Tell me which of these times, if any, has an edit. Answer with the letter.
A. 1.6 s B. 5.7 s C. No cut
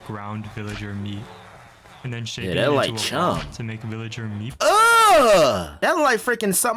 B